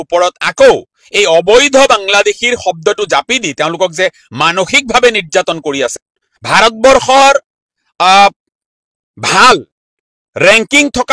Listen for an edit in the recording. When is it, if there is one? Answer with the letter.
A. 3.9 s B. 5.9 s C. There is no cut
B